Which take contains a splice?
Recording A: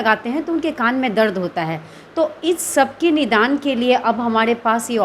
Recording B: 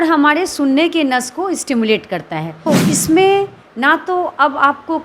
B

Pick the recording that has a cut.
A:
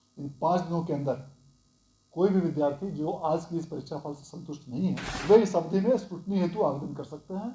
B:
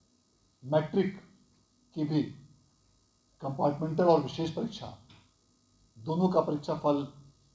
A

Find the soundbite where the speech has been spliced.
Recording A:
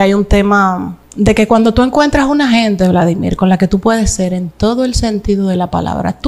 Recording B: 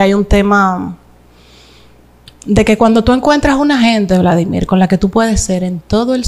A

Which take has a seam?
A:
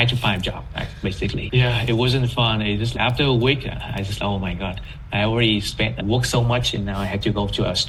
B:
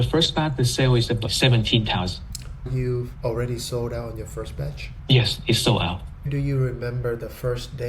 B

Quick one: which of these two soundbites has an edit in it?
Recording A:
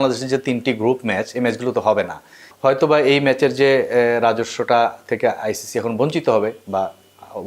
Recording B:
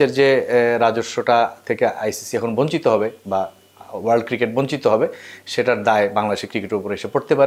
A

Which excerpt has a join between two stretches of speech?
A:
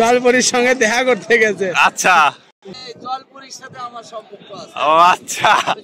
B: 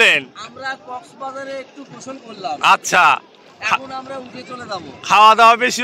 A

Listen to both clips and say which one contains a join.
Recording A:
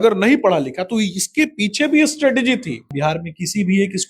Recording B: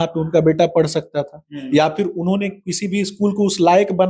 A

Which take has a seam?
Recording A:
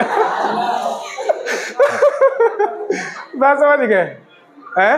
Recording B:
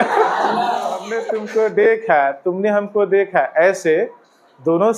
B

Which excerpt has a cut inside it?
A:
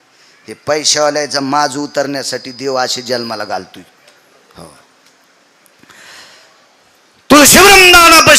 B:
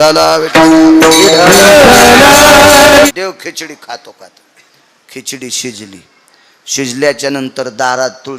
B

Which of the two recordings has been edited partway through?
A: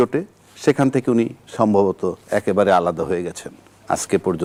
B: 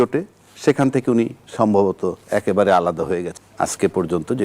B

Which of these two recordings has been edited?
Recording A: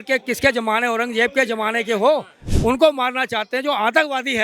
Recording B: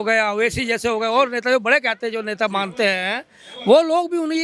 A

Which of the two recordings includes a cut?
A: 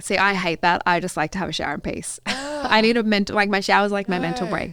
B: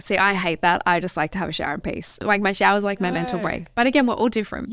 B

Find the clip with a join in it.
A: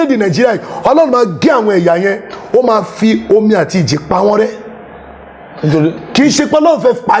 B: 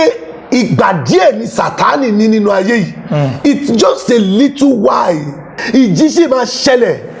B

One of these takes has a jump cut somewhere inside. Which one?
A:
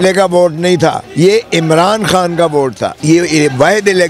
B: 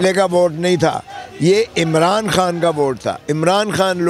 A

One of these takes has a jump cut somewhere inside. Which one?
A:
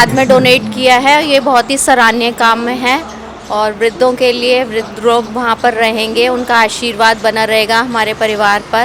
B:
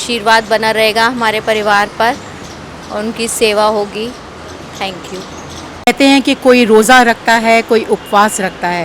B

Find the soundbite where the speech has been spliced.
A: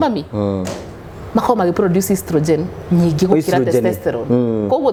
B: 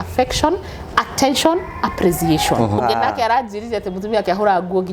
B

